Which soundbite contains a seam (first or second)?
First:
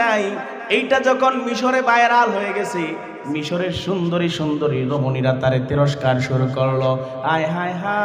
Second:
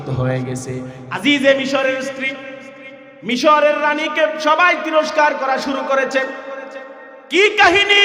second